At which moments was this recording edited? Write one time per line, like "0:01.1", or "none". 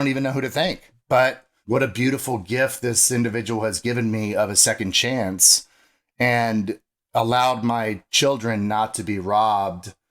0:00.9
0:01.5